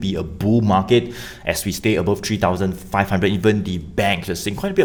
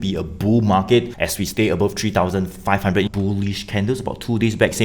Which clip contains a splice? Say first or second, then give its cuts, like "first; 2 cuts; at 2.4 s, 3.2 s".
second; 2 cuts; at 1.2 s, 3.1 s